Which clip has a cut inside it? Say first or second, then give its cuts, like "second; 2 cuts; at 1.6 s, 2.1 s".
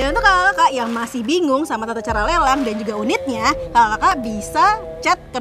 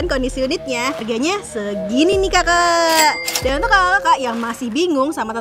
second; 1 cut; at 1.0 s